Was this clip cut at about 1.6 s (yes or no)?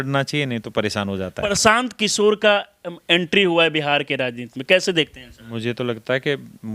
yes